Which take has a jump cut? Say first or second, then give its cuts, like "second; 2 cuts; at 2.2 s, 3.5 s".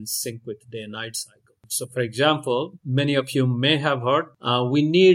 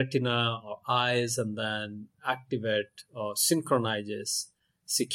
first; 3 cuts; at 1.7 s, 2.8 s, 4.3 s